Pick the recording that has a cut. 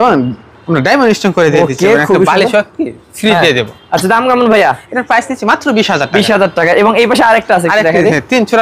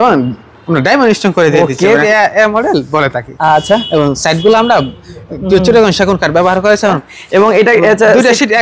second; 2 cuts; at 2.0 s, 7.0 s

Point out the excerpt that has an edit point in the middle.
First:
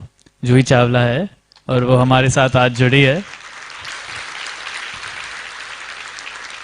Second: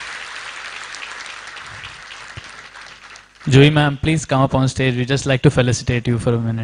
first; 1 cut; at 3.9 s

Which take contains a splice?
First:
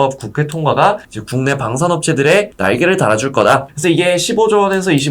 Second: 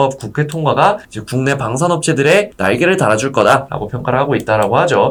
first; 1 cut; at 3.7 s

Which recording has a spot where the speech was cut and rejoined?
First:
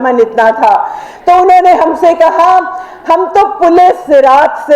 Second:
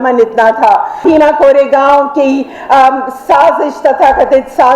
second; 1 cut; at 1.0 s

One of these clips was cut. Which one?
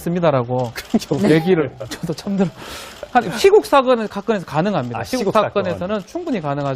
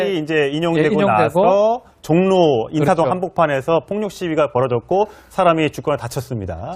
first; 1 cut; at 4.7 s

